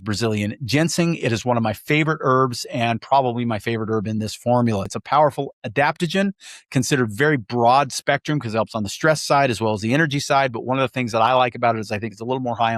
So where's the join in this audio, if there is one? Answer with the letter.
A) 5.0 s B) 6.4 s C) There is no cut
A